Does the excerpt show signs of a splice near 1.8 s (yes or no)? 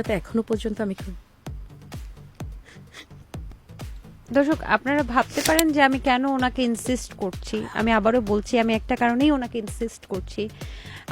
no